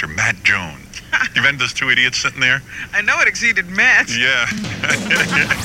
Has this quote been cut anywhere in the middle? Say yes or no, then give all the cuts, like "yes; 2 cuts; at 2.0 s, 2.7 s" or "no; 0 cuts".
yes; 1 cut; at 0.9 s